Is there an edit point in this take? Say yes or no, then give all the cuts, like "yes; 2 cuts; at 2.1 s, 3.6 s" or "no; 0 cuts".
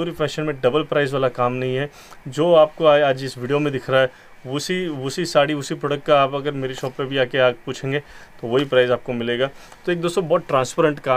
no; 0 cuts